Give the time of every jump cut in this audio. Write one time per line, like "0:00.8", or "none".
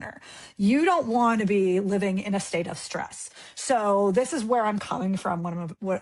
none